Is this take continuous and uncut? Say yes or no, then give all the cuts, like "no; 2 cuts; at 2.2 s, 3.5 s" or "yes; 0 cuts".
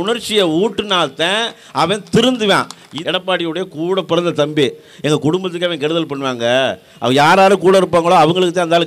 no; 1 cut; at 2.9 s